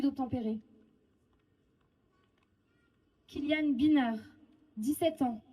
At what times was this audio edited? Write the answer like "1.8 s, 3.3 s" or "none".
none